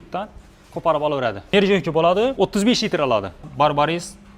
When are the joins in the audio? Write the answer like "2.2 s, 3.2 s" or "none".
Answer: 1.5 s, 2.3 s, 3.5 s